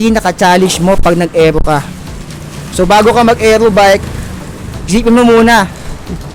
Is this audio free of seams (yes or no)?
yes